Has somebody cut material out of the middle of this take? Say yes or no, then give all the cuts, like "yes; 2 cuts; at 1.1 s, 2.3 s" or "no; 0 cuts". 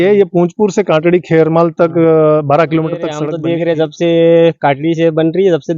yes; 1 cut; at 3.3 s